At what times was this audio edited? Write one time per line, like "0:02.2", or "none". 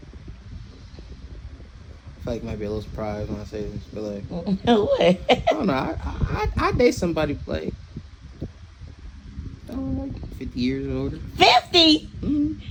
none